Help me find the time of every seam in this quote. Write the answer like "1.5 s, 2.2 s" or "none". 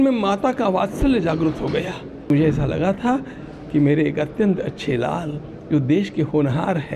2.3 s